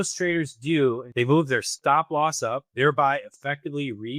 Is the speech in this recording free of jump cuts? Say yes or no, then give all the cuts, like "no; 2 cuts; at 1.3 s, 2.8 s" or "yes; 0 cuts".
no; 1 cut; at 1.1 s